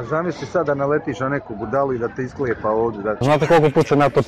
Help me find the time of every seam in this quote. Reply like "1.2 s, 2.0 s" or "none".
3.2 s